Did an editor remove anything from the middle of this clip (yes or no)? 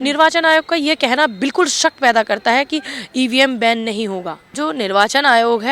yes